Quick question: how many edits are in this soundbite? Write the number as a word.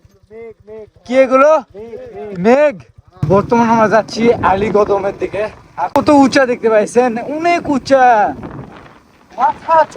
two